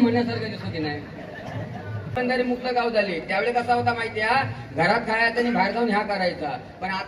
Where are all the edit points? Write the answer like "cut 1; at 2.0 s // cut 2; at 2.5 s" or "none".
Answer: cut 1; at 2.2 s